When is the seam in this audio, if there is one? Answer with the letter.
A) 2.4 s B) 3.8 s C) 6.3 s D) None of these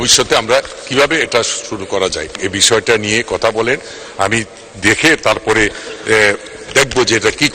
A